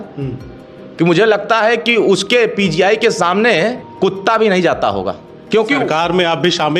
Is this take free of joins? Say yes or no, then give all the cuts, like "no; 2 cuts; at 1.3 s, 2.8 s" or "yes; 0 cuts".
no; 2 cuts; at 3.8 s, 5.3 s